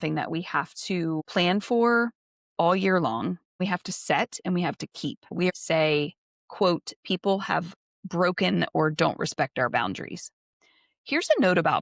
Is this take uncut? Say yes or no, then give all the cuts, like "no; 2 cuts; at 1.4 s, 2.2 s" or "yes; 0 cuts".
no; 3 cuts; at 1.2 s, 3.6 s, 5.5 s